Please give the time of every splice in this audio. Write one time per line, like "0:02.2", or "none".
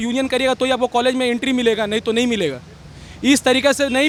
none